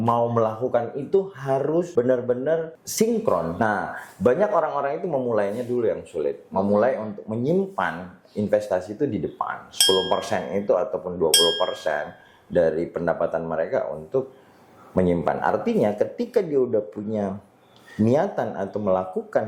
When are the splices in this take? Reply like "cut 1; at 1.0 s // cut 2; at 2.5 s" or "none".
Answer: cut 1; at 1.9 s // cut 2; at 2.8 s // cut 3; at 3.5 s